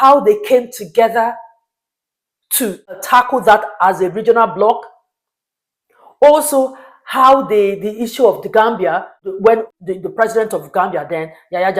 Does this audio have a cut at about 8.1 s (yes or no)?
no